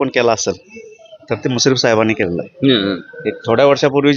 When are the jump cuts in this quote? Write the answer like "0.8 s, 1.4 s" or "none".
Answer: none